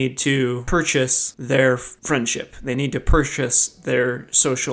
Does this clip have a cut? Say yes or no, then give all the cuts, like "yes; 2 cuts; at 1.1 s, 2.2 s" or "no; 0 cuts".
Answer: yes; 2 cuts; at 0.9 s, 1.9 s